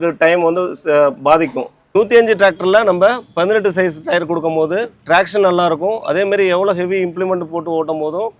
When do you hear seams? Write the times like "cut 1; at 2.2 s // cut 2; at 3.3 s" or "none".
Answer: cut 1; at 1.8 s

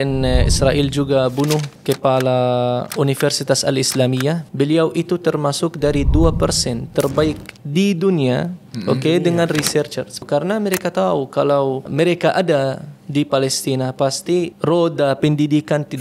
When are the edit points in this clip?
cut 1; at 1.7 s // cut 2; at 2.9 s // cut 3; at 4.5 s // cut 4; at 10.2 s // cut 5; at 11.9 s // cut 6; at 14.5 s

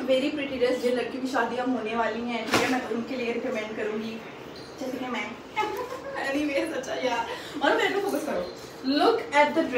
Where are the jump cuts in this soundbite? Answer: none

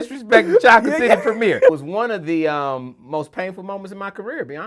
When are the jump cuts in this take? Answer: cut 1; at 1.8 s

